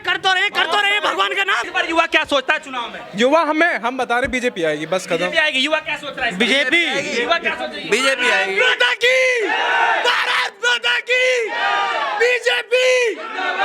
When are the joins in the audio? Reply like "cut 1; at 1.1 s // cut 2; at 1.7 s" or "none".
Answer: none

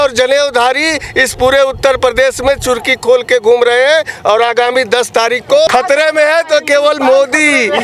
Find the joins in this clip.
cut 1; at 5.7 s

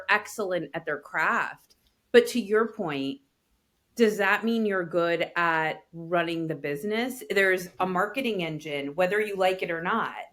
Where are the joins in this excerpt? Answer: none

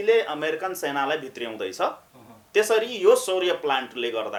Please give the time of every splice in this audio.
none

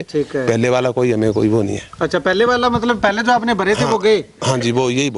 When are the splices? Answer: none

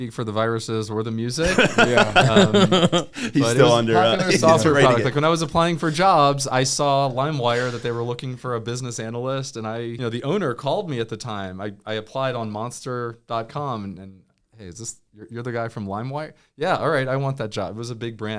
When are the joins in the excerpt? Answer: cut 1; at 10.0 s

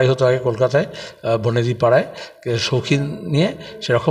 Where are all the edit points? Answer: none

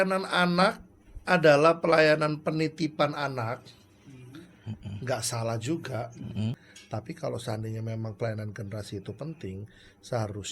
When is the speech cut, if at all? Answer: cut 1; at 6.5 s

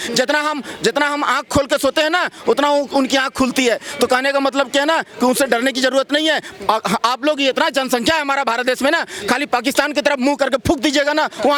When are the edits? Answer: none

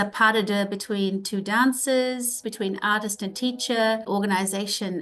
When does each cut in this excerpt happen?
cut 1; at 2.4 s // cut 2; at 4.1 s

